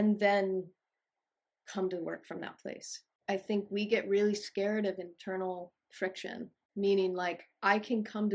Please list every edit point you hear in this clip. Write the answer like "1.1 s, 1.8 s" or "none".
3.1 s, 6.6 s